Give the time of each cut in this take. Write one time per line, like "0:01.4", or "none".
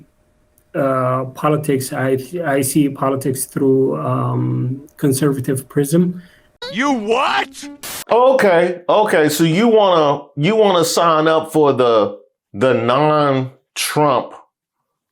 0:06.5